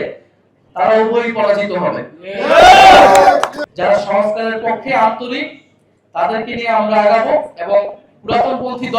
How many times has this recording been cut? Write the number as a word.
one